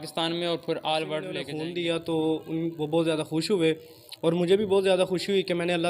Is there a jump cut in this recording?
yes; 1 cut; at 1.5 s

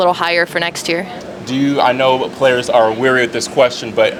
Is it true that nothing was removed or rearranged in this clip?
yes; 0 cuts

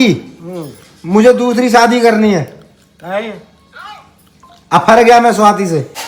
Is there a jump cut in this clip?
no; 0 cuts

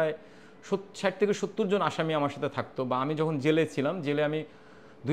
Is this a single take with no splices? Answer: yes; 0 cuts

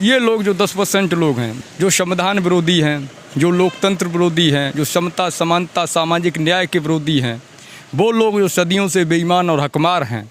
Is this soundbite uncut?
no; 1 cut; at 1.5 s

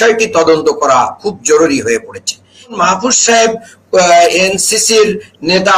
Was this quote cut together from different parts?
yes; 1 cut; at 2.8 s

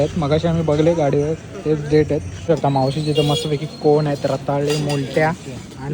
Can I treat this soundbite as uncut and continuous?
no; 1 cut; at 2.3 s

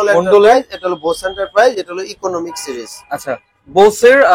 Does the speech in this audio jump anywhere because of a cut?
no; 0 cuts

